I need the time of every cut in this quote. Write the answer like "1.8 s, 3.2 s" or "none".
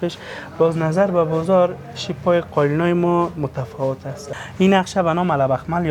4.4 s